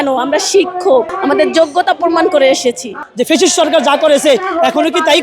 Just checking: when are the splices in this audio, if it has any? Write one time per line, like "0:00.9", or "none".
0:01.1
0:03.0